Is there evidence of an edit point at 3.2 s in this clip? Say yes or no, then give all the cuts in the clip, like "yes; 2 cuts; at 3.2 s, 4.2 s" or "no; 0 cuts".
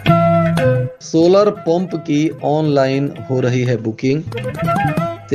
no; 1 cut; at 0.9 s